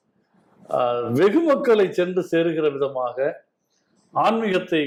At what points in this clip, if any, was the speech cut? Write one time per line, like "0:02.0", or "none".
none